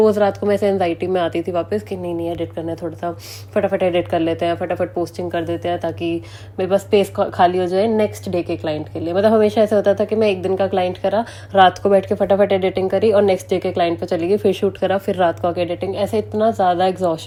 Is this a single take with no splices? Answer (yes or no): yes